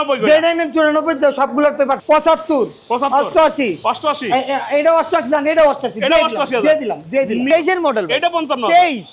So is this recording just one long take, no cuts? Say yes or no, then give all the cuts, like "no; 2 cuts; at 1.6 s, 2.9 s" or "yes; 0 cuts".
no; 2 cuts; at 2.0 s, 7.5 s